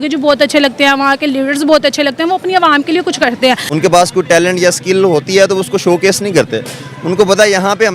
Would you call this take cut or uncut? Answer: cut